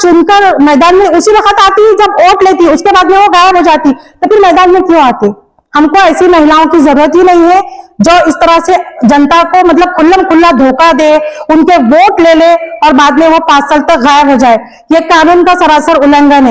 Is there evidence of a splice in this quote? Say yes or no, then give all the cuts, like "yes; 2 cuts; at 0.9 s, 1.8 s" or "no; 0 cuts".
no; 0 cuts